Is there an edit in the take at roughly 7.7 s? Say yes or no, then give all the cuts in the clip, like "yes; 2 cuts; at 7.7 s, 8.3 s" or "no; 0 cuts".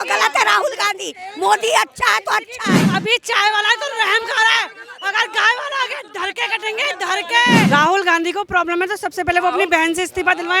yes; 2 cuts; at 2.8 s, 7.7 s